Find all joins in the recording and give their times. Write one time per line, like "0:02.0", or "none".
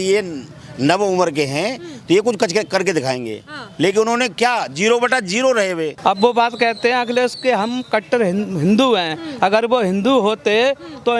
0:05.9